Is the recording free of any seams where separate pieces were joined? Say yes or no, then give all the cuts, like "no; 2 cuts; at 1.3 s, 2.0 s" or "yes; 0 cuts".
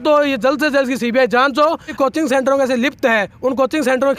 no; 1 cut; at 1.9 s